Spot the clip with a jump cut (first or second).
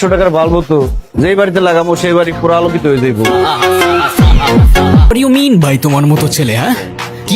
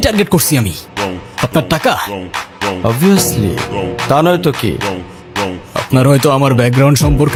first